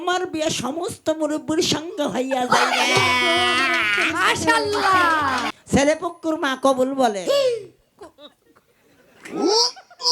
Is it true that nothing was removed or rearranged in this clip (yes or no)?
no